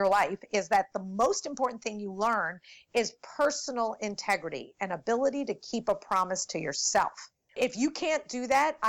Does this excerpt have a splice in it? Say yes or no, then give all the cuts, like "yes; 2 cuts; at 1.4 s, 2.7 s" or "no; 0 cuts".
yes; 1 cut; at 7.6 s